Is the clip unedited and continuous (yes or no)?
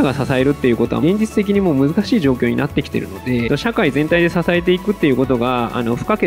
no